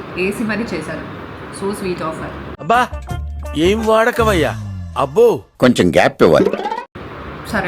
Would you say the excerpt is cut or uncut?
uncut